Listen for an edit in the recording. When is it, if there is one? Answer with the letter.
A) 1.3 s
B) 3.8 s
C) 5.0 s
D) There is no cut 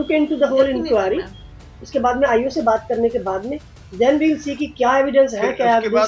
D